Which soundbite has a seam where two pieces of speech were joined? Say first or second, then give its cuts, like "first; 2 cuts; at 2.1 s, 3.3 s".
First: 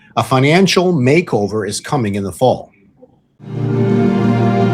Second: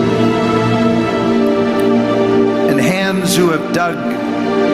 first; 1 cut; at 3.5 s